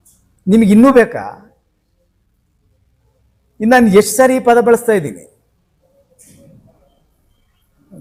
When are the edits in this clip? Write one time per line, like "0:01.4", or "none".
none